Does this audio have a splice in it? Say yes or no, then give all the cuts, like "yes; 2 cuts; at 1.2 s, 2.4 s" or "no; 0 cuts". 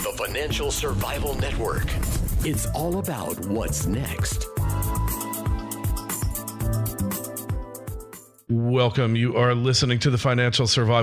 no; 0 cuts